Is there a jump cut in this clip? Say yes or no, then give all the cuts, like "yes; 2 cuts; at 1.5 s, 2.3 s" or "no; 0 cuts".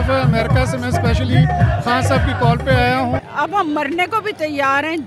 yes; 1 cut; at 3.3 s